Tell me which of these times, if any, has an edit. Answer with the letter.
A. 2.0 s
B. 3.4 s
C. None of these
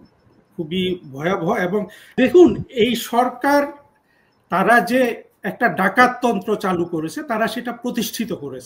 A